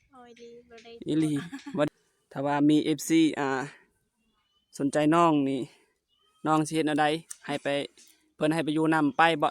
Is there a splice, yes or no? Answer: yes